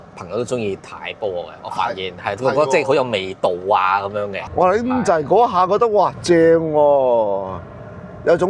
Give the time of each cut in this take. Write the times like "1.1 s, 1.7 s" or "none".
4.4 s